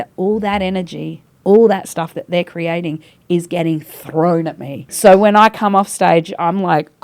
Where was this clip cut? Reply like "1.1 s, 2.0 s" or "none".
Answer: 4.9 s